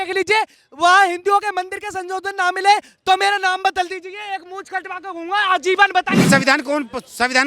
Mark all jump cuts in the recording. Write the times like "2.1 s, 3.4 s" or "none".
6.3 s